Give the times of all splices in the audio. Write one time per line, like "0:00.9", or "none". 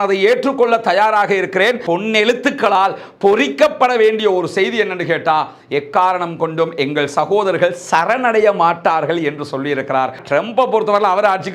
0:01.9
0:10.2